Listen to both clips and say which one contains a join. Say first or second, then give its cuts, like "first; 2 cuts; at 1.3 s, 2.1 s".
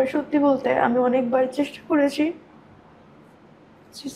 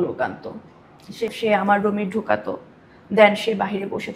second; 1 cut; at 1.3 s